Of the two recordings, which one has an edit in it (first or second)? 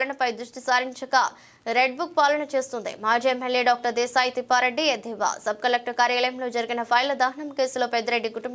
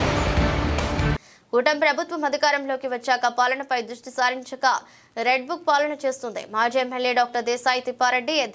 second